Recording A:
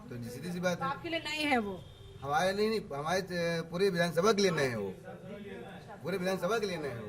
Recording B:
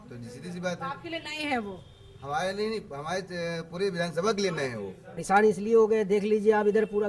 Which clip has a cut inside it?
B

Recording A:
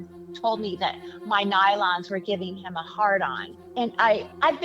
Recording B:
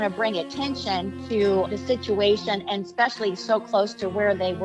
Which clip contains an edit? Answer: A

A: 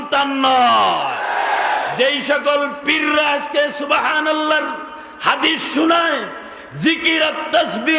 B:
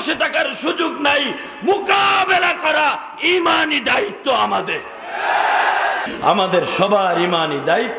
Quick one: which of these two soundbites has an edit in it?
B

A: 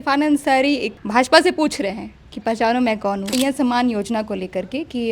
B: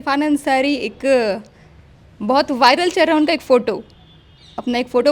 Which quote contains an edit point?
A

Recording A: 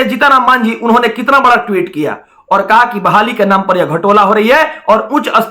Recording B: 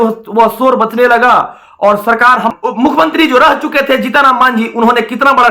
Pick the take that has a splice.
B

